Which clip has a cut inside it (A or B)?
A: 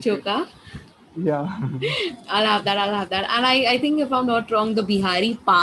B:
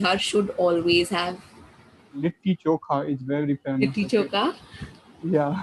B